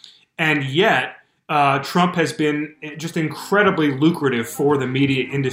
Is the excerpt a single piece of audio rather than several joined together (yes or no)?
yes